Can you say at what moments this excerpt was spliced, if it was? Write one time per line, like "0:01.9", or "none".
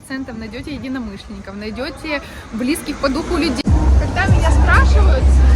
0:03.6